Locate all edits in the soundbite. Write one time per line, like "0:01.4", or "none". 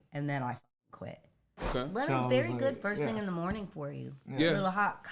0:01.7